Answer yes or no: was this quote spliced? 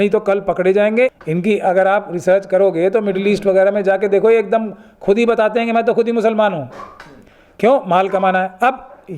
yes